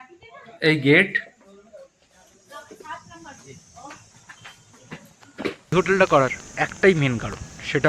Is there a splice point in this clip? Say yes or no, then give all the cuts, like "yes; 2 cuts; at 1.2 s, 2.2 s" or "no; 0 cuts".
yes; 1 cut; at 5.7 s